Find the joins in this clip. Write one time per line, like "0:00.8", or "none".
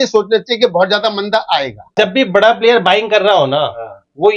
0:01.9